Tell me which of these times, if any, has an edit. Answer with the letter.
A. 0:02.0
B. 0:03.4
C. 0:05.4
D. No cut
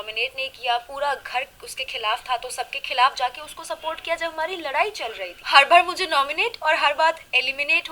C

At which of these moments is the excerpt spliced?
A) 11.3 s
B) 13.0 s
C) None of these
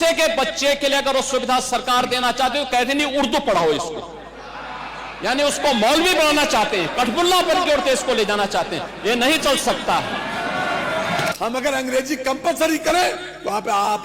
A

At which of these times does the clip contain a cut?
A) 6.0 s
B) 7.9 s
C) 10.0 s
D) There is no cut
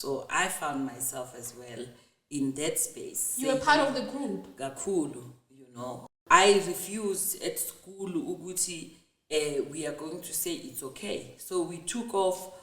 A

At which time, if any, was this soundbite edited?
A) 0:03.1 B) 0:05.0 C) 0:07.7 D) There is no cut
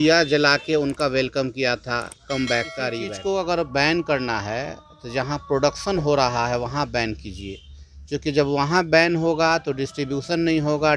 A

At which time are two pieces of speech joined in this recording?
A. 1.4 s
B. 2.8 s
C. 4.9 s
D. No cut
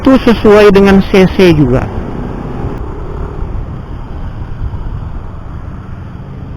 B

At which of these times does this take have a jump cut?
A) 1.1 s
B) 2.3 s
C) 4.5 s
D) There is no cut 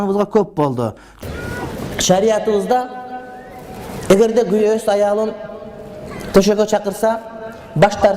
A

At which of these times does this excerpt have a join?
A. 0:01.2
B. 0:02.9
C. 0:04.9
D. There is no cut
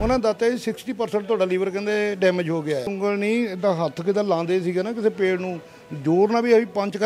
B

